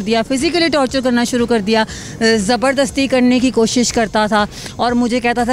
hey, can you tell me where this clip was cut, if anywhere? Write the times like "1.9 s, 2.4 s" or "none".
none